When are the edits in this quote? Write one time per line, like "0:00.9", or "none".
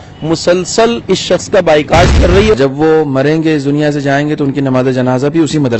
0:02.5